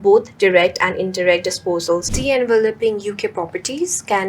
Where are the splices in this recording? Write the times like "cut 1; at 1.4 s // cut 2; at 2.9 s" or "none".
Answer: cut 1; at 2.1 s